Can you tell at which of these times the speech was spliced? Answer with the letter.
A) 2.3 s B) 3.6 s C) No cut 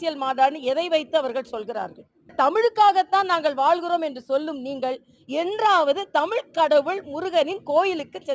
A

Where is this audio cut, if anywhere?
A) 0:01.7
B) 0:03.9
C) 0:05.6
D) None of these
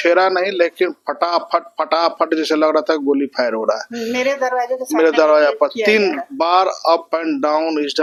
D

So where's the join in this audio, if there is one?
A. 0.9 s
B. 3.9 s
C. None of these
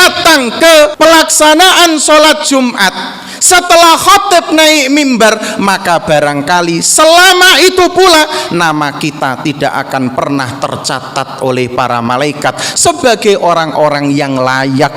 A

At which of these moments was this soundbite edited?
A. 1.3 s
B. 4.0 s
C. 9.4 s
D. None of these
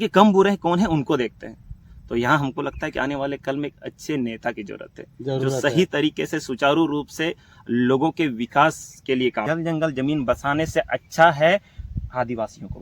C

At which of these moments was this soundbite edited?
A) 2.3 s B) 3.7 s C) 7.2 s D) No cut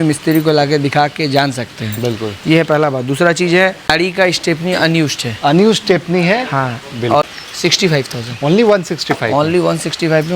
C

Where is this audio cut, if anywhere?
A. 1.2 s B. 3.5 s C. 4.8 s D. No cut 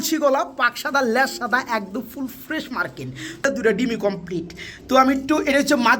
B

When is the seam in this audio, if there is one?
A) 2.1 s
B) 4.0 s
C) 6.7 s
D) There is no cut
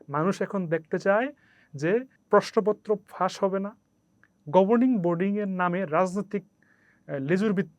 A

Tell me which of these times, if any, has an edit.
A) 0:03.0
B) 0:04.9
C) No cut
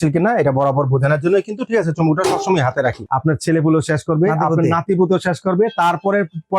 A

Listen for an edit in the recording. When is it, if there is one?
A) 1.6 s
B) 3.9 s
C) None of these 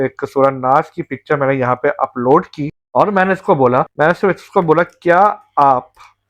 B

